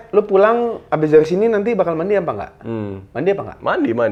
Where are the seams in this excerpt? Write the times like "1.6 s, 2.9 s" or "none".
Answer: none